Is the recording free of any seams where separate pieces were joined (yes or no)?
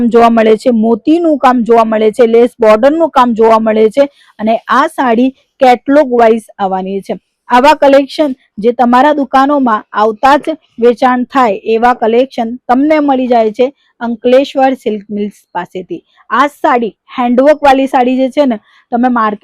yes